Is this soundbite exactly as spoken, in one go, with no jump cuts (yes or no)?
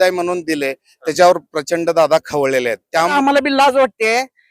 no